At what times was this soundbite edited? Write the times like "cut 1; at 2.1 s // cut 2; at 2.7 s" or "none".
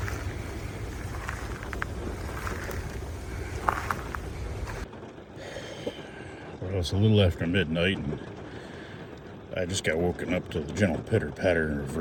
none

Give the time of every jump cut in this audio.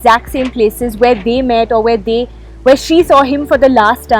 none

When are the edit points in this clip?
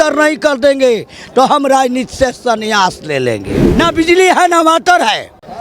cut 1; at 3.6 s

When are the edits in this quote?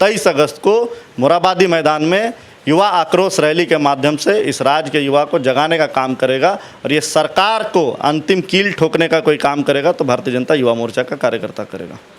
none

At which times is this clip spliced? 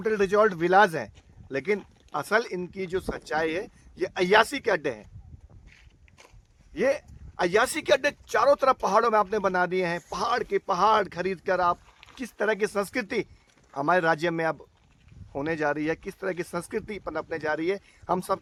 none

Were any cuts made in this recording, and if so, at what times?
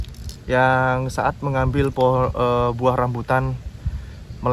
none

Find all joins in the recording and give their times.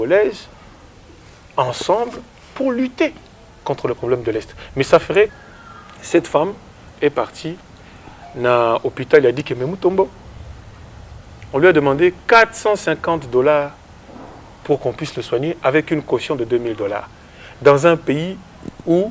cut 1; at 5.3 s

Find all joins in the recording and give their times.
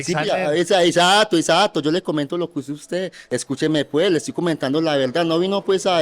cut 1; at 3.2 s

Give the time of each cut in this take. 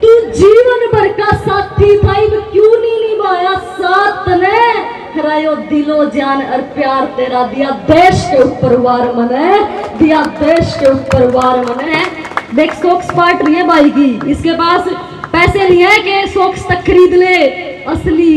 cut 1; at 11.9 s

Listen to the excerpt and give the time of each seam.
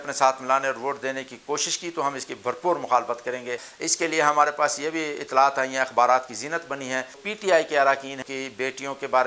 cut 1; at 3.7 s // cut 2; at 7.2 s // cut 3; at 8.2 s

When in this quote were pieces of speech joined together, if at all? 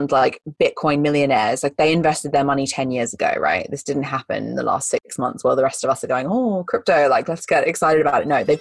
none

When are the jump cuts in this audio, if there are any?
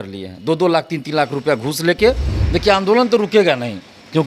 cut 1; at 2.3 s

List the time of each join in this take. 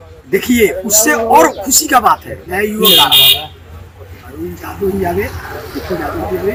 none

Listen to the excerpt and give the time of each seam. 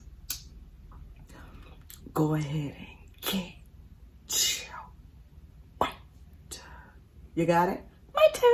none

